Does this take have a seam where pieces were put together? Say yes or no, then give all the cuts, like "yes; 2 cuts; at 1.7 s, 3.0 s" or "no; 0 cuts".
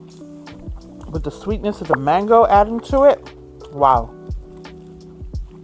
no; 0 cuts